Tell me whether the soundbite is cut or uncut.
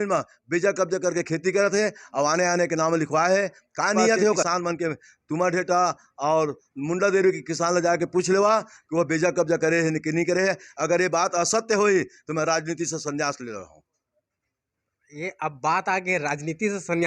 cut